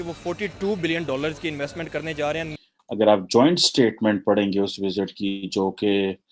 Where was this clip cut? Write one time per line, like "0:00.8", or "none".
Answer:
0:02.5